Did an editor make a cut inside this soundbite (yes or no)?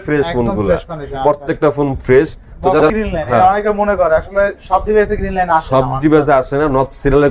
yes